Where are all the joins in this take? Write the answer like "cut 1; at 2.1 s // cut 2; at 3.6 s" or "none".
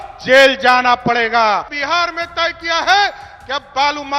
cut 1; at 1.8 s